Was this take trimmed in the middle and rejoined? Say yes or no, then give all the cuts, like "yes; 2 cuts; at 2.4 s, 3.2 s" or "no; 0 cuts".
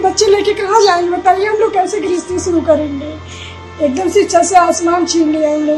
no; 0 cuts